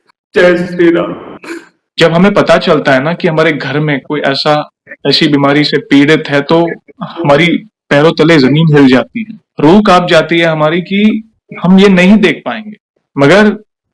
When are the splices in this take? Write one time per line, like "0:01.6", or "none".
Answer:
0:01.8